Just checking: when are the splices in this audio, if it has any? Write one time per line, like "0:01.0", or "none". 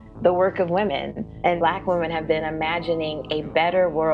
0:01.5